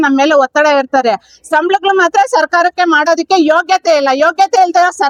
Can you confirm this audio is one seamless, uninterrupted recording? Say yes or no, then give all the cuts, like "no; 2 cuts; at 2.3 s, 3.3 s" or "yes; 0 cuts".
yes; 0 cuts